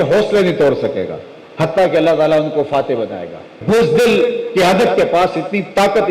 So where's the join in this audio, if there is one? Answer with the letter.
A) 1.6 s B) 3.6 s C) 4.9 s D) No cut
B